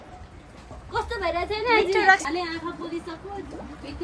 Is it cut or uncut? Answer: cut